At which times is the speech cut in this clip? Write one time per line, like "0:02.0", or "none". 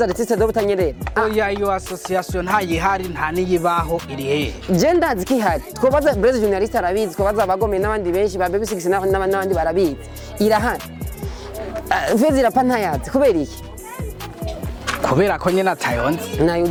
none